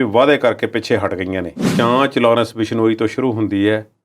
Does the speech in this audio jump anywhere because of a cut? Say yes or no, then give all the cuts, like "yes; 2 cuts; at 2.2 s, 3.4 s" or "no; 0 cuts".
yes; 1 cut; at 1.7 s